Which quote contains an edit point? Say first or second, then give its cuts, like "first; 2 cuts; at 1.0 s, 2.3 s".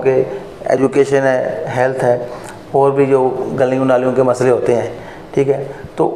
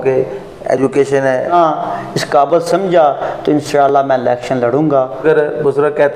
second; 2 cuts; at 1.5 s, 5.2 s